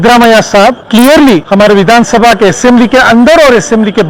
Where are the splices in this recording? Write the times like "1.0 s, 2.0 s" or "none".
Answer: 0.8 s, 1.5 s